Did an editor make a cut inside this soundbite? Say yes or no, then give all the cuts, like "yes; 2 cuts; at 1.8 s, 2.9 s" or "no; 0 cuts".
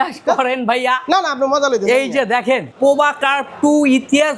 yes; 1 cut; at 2.7 s